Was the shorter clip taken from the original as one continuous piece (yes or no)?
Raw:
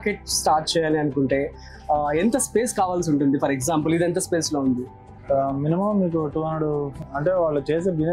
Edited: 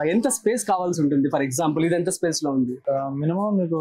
no